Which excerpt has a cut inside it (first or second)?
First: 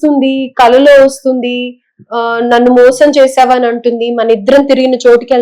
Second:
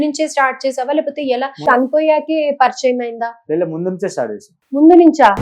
second